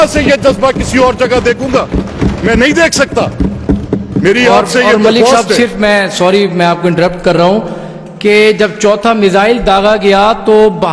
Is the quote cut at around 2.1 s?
no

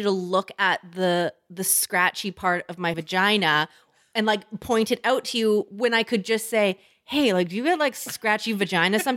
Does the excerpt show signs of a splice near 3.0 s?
yes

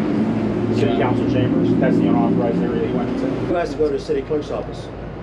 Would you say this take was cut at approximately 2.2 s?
no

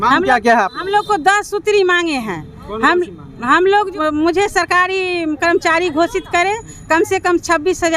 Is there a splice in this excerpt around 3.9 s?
yes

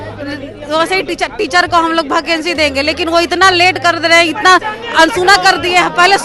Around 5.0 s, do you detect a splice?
no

